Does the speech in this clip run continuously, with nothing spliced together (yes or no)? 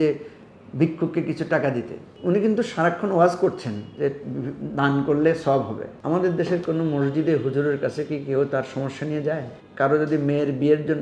no